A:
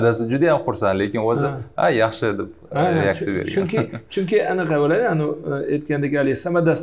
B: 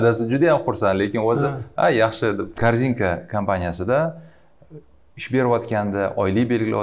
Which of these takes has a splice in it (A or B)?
B